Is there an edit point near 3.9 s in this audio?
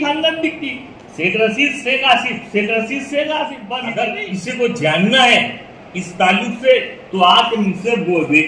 yes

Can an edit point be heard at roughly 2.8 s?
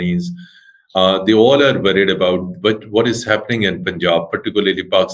no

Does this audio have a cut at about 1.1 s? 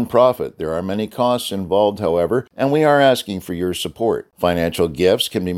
no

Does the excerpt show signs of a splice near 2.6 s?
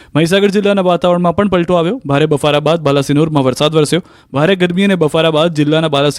yes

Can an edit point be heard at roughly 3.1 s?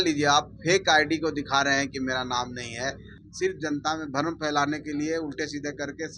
yes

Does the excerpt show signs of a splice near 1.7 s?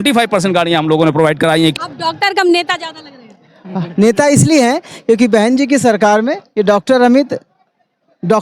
yes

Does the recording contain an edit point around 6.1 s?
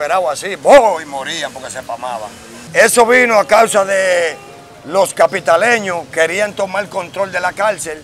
no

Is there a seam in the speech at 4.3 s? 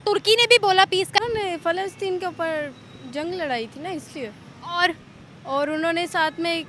no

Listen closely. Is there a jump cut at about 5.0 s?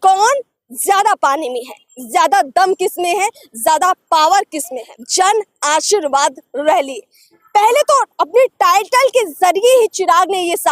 yes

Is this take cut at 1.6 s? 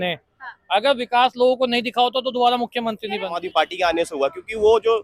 no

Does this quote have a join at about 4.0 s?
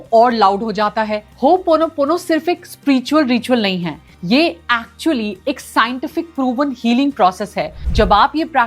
no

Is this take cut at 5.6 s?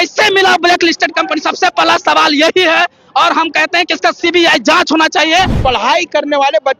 yes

